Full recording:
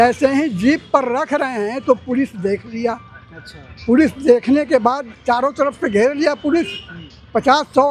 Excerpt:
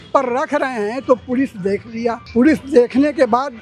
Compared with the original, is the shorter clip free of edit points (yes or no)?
no